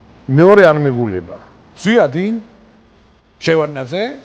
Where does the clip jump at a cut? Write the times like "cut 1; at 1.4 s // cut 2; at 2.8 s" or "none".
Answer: cut 1; at 1.7 s